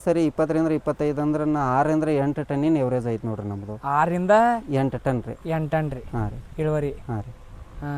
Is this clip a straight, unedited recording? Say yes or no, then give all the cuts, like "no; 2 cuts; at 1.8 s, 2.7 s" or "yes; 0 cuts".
yes; 0 cuts